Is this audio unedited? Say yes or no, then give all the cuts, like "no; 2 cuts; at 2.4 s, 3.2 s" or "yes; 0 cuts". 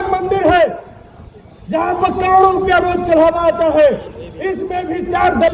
yes; 0 cuts